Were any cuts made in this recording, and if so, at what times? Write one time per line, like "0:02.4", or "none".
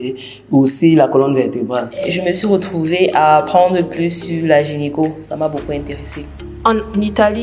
0:02.0
0:06.4